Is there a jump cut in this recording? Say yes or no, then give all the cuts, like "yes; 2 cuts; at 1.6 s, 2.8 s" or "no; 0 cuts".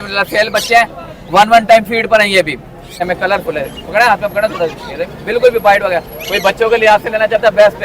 yes; 1 cut; at 3.0 s